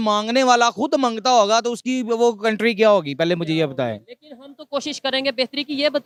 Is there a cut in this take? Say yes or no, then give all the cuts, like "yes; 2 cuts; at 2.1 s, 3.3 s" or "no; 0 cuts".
no; 0 cuts